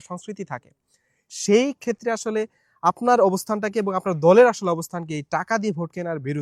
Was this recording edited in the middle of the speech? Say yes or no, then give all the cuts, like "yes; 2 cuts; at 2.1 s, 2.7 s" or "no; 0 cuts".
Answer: no; 0 cuts